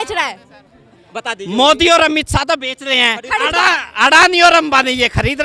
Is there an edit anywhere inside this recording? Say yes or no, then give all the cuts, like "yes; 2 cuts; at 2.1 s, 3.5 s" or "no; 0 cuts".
no; 0 cuts